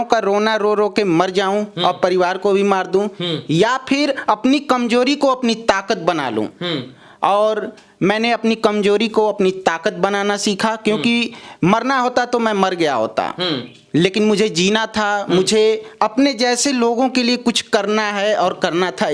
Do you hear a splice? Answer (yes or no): no